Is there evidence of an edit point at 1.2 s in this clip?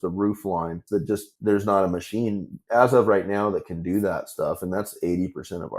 yes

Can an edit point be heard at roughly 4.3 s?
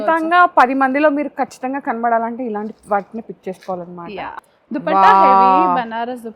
yes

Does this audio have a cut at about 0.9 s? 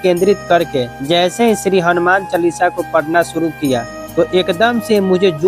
yes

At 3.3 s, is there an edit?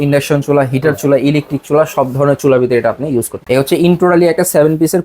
yes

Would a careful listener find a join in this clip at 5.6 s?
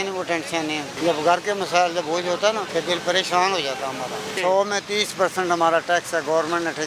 no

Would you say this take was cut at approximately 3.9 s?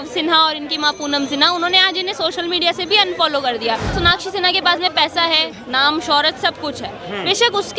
yes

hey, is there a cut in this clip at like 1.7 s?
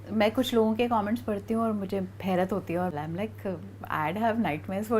no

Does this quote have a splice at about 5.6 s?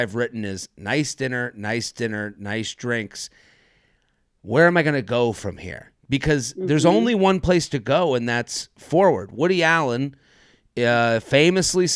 no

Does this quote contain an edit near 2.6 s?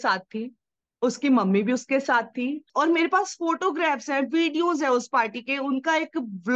yes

